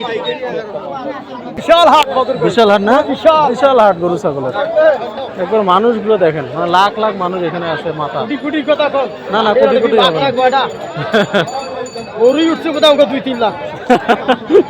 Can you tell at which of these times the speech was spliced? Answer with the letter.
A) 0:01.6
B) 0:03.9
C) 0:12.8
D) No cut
A